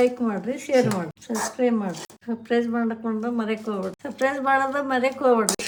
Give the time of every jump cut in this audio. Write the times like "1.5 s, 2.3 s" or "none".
none